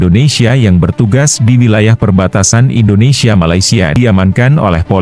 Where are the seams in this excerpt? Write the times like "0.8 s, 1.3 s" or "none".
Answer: 3.9 s